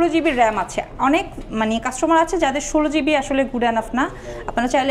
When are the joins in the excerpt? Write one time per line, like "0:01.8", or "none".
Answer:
none